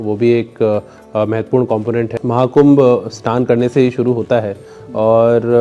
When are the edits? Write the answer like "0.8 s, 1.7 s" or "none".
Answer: 2.2 s